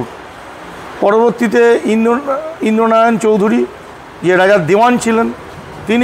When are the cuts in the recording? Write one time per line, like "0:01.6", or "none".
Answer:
none